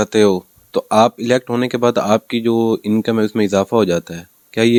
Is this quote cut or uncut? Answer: uncut